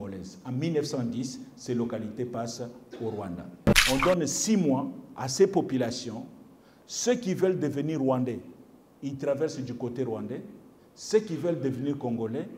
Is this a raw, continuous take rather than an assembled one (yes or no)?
no